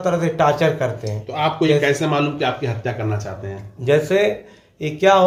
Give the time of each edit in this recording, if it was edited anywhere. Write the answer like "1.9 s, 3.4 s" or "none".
none